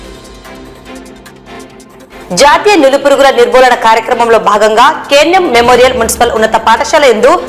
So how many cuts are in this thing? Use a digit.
2